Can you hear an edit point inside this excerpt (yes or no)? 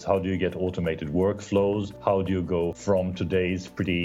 yes